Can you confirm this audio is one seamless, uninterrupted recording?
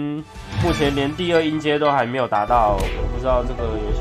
yes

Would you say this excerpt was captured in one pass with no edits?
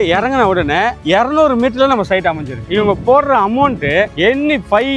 no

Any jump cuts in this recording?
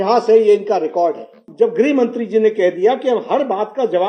yes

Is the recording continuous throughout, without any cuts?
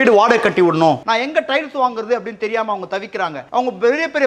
no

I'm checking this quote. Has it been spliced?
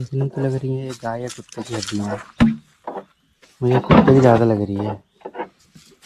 no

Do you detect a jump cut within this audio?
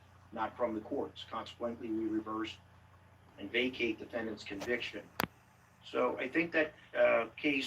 no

